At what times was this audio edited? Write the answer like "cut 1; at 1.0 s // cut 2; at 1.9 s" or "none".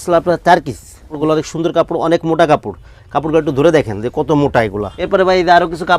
cut 1; at 1.1 s // cut 2; at 4.9 s